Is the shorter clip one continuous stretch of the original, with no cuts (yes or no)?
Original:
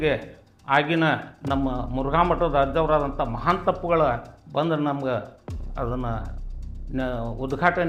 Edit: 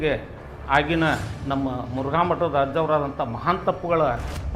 yes